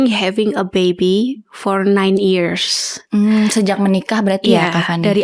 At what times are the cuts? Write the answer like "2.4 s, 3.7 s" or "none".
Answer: none